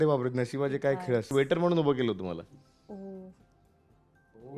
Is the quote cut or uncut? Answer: cut